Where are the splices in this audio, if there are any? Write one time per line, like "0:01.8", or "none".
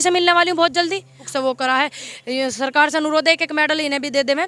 0:01.2